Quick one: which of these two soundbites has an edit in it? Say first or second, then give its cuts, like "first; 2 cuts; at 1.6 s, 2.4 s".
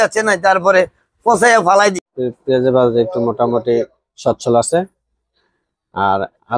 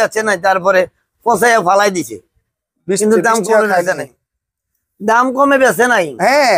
first; 1 cut; at 2.1 s